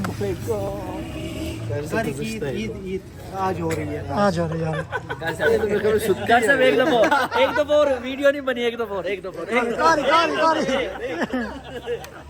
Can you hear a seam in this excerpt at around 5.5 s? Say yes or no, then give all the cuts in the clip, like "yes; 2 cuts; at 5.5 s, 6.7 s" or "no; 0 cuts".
no; 0 cuts